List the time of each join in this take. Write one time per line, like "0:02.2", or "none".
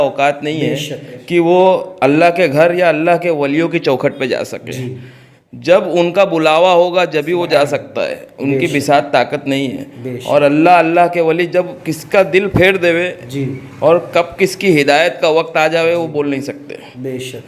none